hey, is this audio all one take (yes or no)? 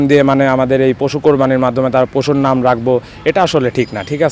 yes